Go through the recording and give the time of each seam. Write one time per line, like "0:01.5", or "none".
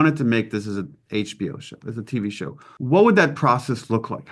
0:02.6